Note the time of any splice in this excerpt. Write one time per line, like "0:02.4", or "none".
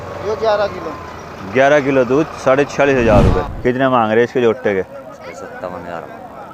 0:03.5